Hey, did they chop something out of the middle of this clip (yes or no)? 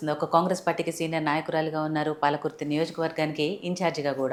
no